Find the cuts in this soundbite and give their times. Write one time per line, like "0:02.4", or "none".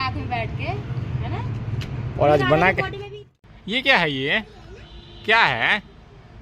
0:03.0